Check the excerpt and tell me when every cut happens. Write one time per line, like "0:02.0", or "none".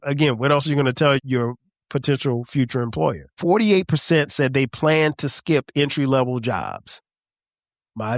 0:01.2
0:03.3